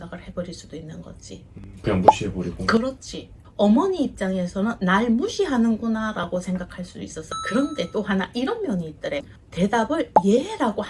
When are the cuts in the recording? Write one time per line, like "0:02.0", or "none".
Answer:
0:03.3
0:07.3